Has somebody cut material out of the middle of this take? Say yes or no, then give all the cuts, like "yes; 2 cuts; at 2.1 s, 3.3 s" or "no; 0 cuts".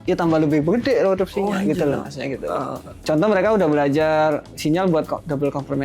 yes; 1 cut; at 3.0 s